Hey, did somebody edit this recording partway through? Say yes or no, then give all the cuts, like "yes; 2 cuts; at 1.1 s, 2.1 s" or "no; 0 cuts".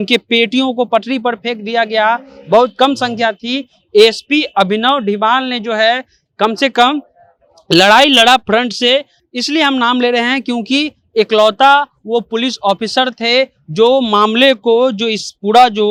no; 0 cuts